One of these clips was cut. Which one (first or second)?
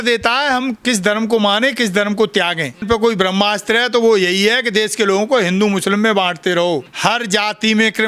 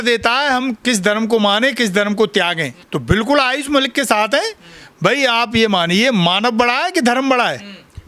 first